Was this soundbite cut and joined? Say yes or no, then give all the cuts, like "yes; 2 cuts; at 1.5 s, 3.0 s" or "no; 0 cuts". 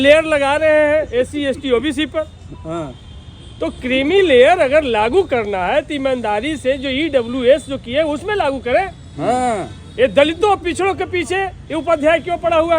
no; 0 cuts